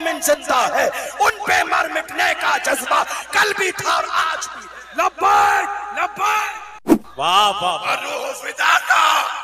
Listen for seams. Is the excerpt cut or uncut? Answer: cut